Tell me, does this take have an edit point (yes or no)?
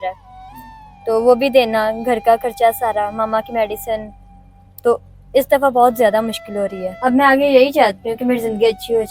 yes